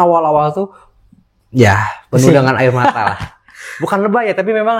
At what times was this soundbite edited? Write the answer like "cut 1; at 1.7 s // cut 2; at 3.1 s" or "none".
none